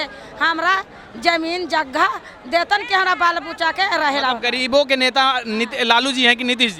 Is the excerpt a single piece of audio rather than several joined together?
yes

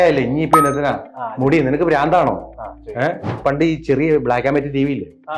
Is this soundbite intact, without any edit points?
no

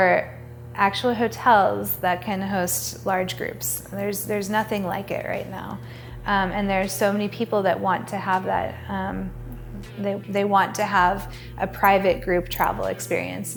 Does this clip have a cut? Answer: no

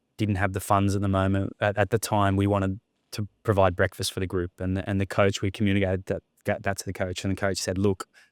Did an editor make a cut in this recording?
no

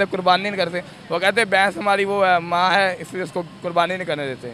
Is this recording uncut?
yes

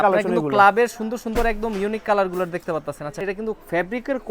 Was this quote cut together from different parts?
yes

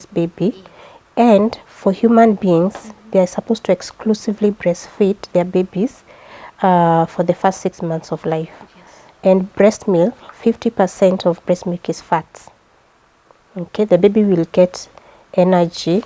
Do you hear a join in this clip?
no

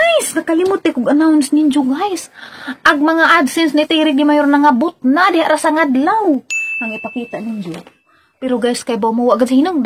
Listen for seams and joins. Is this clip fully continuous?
yes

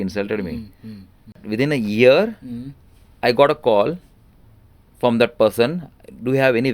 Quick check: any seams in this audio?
yes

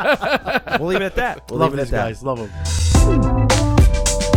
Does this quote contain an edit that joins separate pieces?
yes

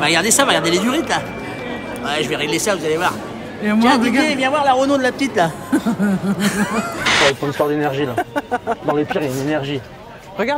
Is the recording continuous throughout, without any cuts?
no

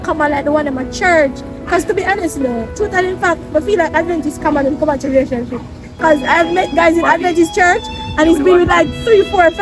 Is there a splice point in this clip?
no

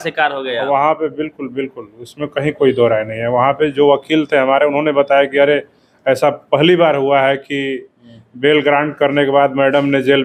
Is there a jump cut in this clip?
no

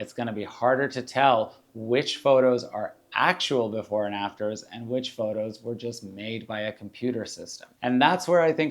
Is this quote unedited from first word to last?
no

